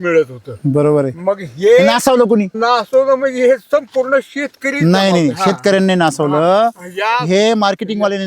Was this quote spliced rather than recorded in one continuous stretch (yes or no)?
yes